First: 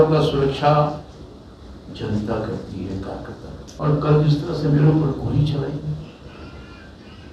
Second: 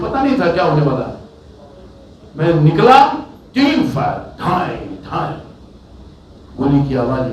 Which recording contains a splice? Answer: first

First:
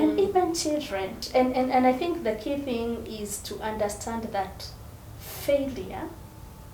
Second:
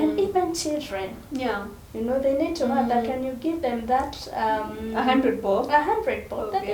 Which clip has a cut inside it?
first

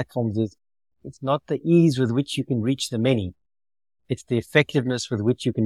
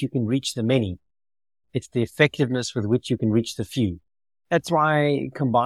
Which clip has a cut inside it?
second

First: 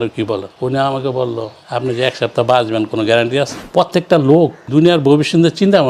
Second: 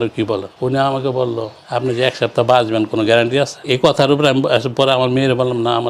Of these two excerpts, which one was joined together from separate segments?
first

